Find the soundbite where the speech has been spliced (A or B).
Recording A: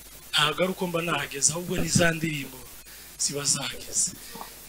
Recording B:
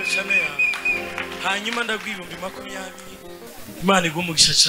B